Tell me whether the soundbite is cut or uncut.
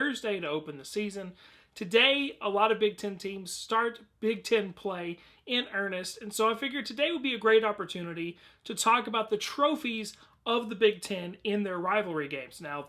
uncut